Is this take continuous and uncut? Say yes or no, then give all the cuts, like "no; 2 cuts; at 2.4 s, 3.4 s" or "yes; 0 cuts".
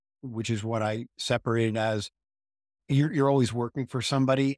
yes; 0 cuts